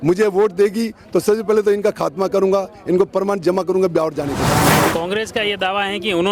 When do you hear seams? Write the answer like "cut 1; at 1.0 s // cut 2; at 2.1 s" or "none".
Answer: cut 1; at 4.6 s

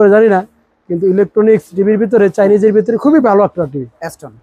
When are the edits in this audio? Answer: none

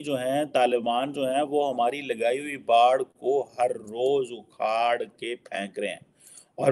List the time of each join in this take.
none

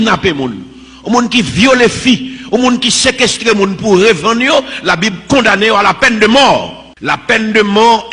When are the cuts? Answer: cut 1; at 6.9 s

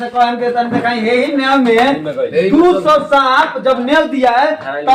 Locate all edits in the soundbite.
none

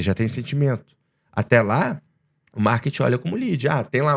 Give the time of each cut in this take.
none

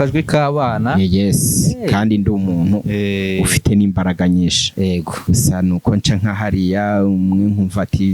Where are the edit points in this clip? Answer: cut 1; at 5.2 s

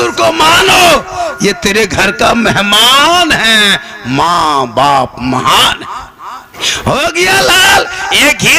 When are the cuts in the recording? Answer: cut 1; at 6.6 s

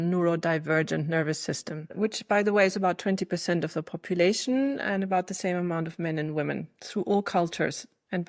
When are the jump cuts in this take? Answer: cut 1; at 1.9 s

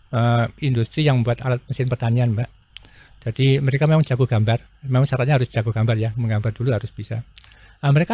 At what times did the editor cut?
none

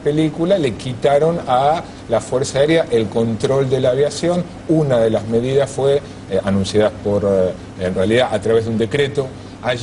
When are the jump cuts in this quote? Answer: cut 1; at 3.0 s

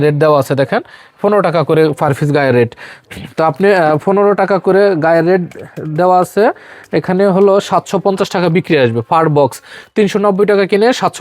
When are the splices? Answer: none

